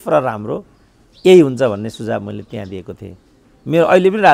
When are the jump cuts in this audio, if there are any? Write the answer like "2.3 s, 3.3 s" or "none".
none